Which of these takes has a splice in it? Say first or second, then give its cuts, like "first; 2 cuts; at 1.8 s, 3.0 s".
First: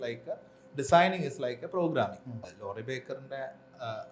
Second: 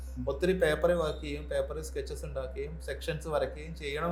first; 1 cut; at 2.4 s